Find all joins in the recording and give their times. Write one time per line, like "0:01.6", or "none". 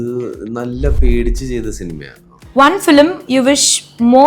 0:02.3